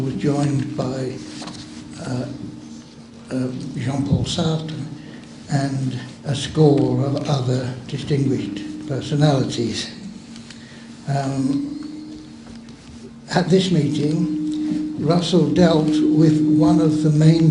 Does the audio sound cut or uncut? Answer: cut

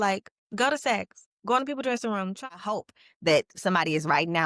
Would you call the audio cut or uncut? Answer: cut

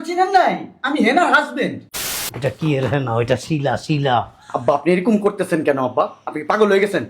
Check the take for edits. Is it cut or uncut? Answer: cut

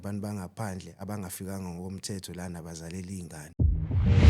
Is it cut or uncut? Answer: cut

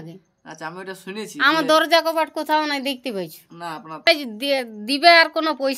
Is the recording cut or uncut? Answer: cut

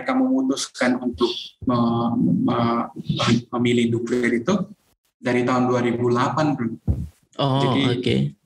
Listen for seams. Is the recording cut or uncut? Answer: uncut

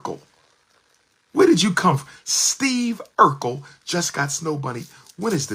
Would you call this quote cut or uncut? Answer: uncut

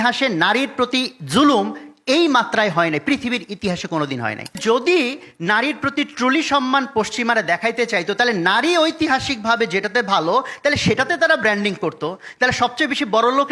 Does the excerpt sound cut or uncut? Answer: cut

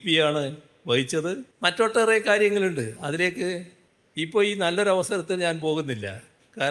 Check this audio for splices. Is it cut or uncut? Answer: cut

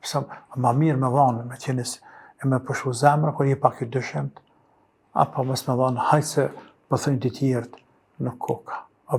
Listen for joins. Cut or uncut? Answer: uncut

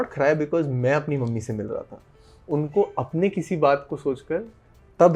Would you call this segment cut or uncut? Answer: uncut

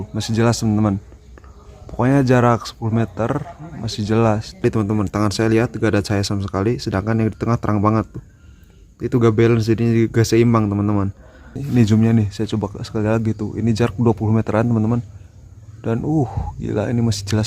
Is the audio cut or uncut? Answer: cut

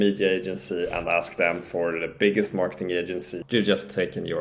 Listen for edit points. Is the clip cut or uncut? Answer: cut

